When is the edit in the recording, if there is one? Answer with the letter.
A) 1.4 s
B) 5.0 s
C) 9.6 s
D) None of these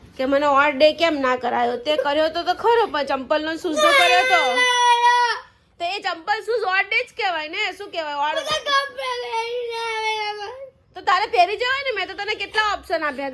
D